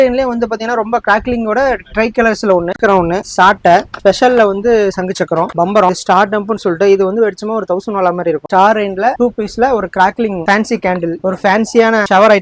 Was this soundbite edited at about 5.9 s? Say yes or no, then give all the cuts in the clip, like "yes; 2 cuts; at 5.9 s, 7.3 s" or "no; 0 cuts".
yes; 3 cuts; at 2.8 s, 5.9 s, 8.4 s